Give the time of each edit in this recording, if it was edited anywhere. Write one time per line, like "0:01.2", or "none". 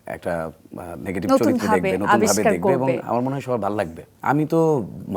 0:04.1